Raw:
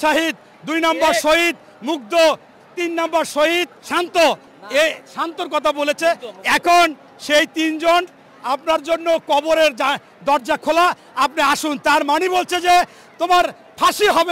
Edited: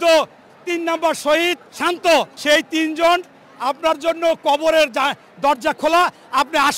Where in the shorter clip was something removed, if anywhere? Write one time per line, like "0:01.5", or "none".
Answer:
0:02.3

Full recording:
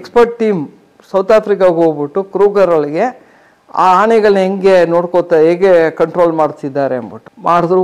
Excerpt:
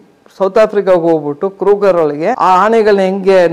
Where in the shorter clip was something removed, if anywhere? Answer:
0:02.4

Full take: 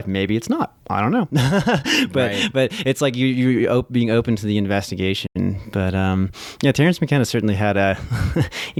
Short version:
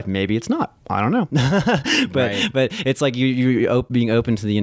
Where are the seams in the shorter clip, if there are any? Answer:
none

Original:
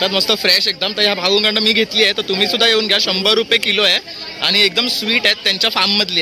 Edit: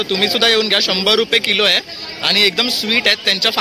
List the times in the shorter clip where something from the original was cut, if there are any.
none

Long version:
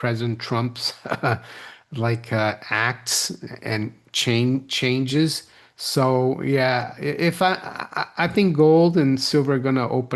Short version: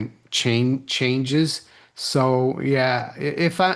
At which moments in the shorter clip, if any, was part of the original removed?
none

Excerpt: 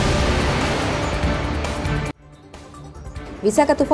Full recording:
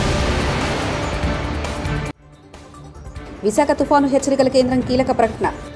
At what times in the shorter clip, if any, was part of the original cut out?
none

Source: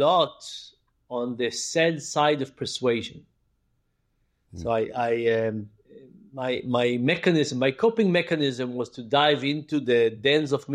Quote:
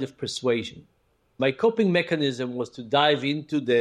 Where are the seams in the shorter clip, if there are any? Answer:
0:01.3

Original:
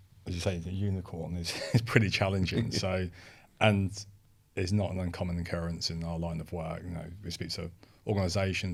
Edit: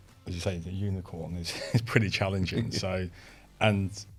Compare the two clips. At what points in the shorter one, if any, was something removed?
none

